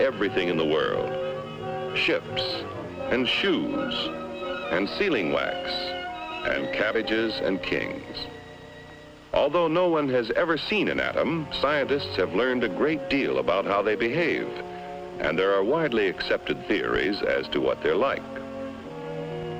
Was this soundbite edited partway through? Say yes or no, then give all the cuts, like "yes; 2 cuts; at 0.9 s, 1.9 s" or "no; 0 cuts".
yes; 1 cut; at 12.1 s